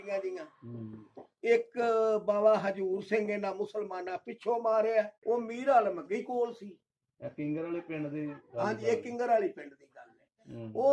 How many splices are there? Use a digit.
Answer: 1